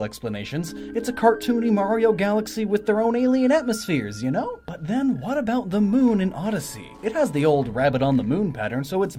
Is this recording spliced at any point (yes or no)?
no